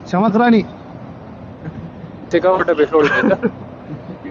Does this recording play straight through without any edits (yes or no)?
no